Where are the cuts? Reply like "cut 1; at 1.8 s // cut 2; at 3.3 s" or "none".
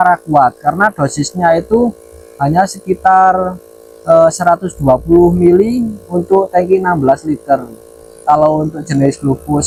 none